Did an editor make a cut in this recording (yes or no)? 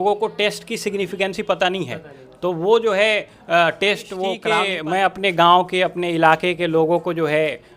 yes